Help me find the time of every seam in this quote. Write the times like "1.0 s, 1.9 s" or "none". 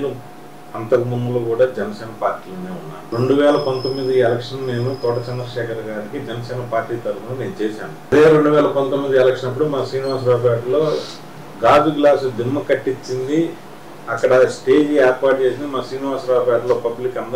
3.0 s, 8.1 s